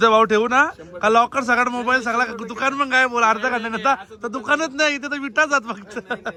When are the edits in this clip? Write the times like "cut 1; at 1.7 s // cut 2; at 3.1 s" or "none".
none